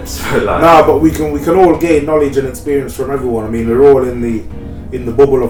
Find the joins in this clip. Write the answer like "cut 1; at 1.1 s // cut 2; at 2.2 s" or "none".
none